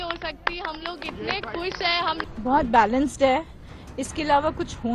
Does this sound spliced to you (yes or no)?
yes